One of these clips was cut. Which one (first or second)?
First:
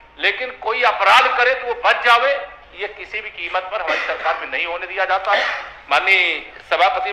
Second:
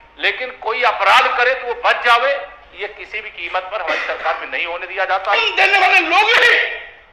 second